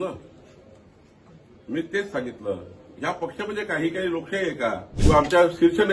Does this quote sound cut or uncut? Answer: cut